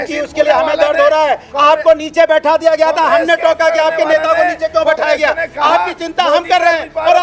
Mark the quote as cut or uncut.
uncut